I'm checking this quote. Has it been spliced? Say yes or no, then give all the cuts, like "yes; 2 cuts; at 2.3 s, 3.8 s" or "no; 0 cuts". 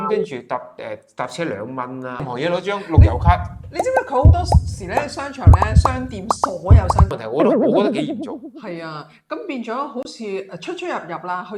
yes; 2 cuts; at 2.2 s, 7.1 s